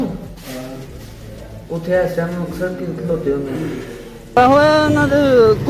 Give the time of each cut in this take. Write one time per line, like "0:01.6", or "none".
0:04.4